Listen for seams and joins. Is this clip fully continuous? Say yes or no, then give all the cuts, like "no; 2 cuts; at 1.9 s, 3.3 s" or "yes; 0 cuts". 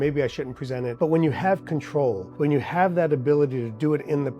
no; 2 cuts; at 0.9 s, 2.3 s